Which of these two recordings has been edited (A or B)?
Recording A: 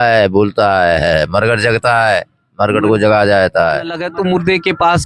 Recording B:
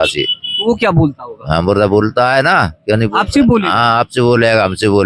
A